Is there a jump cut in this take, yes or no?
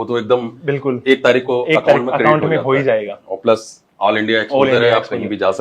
no